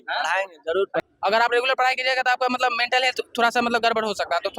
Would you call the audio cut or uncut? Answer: cut